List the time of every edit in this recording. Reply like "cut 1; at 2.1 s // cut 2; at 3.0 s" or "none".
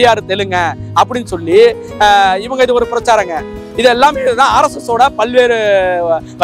none